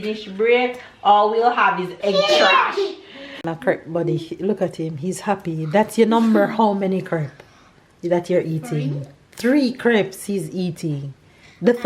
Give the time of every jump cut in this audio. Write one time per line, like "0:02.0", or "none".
0:03.4